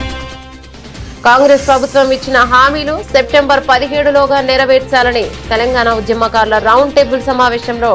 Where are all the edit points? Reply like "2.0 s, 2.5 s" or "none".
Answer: 0.9 s